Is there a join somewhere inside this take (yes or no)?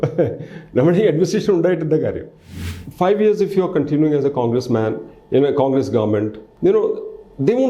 yes